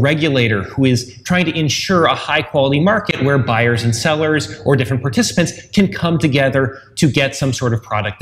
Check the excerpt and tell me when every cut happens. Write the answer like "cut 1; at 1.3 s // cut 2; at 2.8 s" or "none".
none